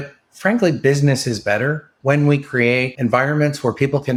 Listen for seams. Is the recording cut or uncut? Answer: uncut